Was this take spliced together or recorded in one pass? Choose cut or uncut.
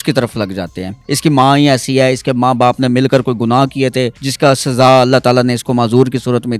cut